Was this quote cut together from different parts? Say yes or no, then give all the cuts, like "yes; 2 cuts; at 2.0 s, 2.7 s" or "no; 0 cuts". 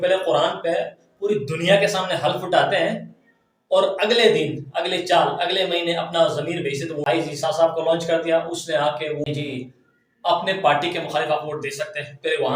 yes; 2 cuts; at 7.0 s, 9.2 s